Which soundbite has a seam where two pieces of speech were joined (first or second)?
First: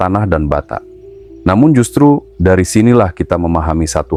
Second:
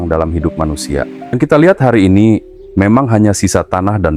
second